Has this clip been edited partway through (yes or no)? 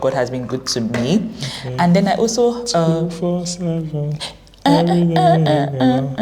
no